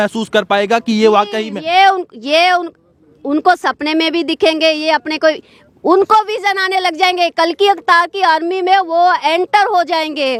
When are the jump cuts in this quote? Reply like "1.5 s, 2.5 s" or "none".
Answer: none